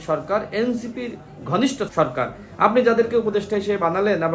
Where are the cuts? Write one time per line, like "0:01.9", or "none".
0:01.9